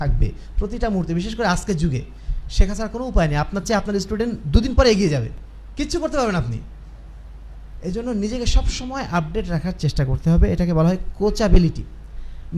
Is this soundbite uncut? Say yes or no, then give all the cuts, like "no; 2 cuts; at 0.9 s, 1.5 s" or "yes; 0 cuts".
yes; 0 cuts